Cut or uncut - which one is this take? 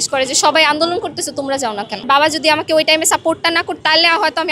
cut